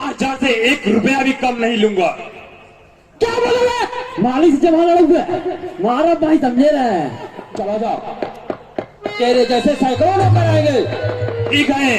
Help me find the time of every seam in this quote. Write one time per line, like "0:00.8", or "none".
0:07.4